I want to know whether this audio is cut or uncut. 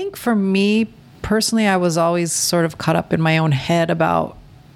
cut